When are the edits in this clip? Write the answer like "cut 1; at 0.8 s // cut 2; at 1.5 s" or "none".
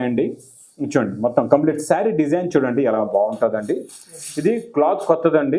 cut 1; at 3.0 s